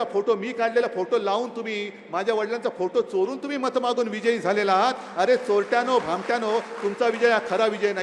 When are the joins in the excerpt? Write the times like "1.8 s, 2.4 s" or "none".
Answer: none

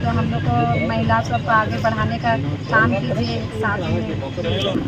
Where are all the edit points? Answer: none

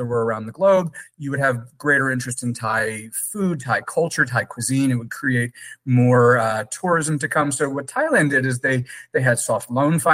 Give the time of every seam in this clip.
none

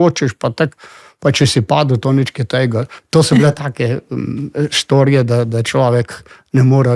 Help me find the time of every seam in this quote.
2.9 s

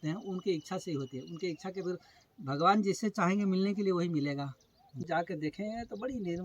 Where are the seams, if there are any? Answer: 5.0 s

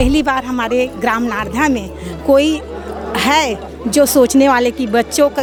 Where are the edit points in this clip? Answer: none

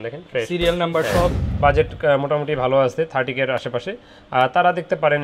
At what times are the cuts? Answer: 1.4 s

